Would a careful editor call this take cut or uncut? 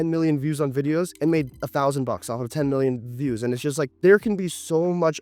uncut